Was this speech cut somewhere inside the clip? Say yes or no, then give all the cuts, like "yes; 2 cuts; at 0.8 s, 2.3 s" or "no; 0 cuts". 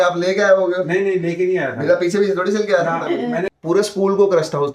yes; 1 cut; at 3.5 s